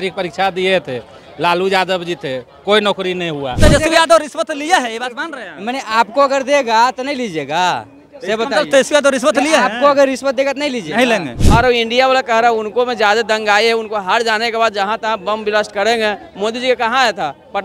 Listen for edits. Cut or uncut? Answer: cut